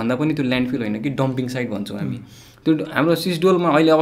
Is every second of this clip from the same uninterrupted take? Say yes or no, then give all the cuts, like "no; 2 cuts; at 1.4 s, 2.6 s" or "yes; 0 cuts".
yes; 0 cuts